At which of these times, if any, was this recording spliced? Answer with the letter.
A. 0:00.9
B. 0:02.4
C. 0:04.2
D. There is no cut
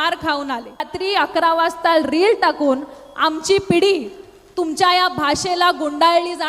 A